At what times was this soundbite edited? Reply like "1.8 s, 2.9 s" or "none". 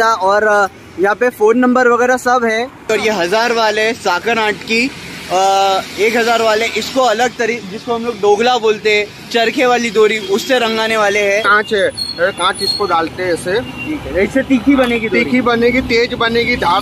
2.9 s, 11.5 s